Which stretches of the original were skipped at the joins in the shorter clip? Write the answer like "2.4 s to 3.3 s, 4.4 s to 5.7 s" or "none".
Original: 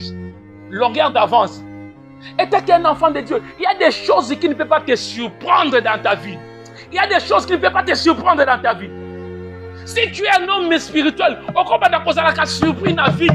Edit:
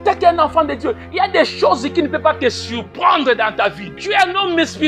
6.4 s to 10.1 s